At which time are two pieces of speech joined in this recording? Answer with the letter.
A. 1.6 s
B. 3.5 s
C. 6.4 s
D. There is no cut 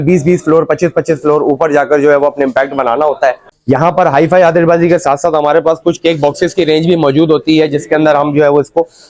B